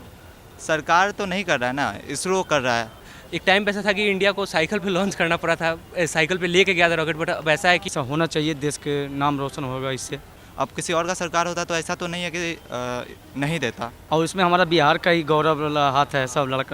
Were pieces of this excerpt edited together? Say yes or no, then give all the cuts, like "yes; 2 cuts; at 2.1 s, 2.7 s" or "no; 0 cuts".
yes; 4 cuts; at 3.0 s, 7.9 s, 10.4 s, 13.9 s